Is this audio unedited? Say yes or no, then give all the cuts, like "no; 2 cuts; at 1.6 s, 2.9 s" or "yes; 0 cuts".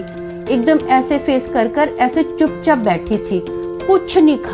yes; 0 cuts